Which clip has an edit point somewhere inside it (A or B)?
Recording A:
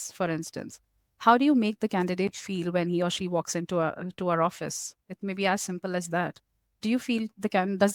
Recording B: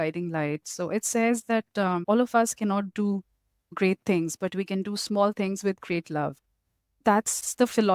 B